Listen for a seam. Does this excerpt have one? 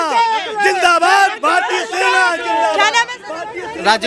no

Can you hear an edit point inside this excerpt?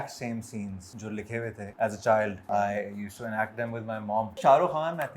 yes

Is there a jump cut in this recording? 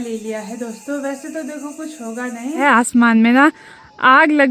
yes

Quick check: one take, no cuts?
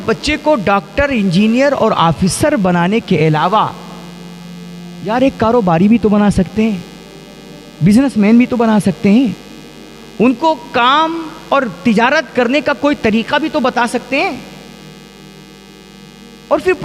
yes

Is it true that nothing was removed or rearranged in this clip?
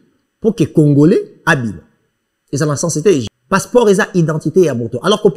no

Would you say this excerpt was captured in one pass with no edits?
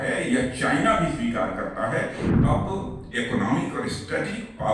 no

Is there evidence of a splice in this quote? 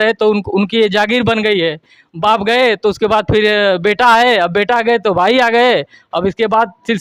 no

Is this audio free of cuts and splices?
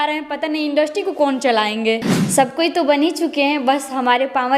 no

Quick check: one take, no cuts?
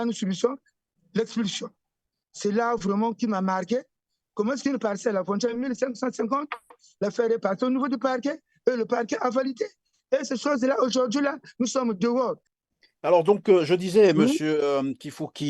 no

